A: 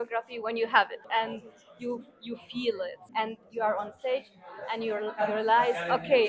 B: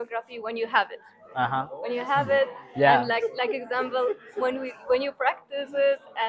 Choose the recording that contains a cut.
A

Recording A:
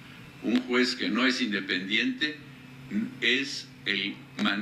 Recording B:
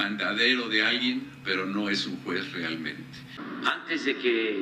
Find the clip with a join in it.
B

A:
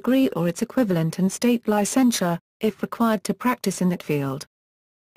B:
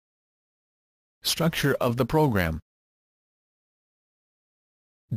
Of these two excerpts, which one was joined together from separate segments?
A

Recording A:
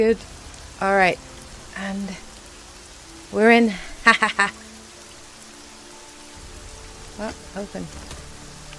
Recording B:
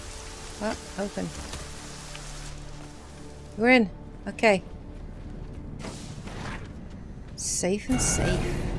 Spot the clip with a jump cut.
B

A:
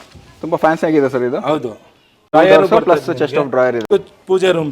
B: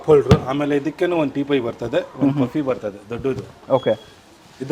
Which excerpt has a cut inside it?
A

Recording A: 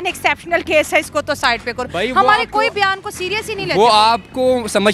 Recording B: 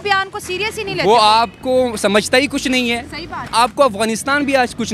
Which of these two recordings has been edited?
B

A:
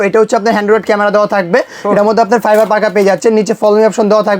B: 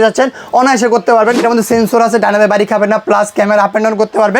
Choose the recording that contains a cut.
B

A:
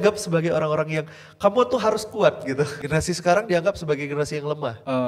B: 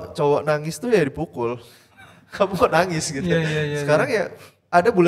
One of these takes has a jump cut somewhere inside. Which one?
A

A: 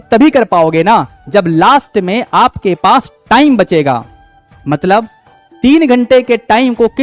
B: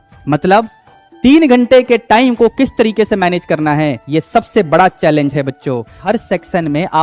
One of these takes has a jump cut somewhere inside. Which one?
B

